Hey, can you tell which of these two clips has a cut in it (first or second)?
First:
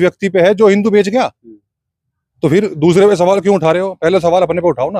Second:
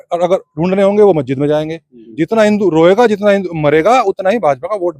second